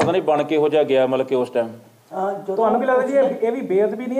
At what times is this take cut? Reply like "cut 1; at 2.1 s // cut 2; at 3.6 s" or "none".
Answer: none